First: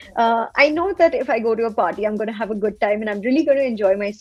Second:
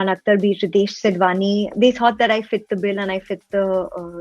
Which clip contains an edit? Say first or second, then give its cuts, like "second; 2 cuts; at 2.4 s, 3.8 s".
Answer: second; 1 cut; at 1.7 s